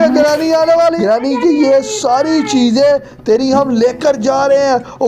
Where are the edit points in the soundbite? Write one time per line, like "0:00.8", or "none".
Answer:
0:01.0